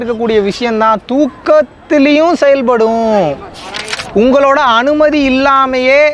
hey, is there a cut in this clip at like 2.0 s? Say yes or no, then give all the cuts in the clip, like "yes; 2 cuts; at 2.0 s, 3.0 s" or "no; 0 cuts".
no; 1 cut; at 3.9 s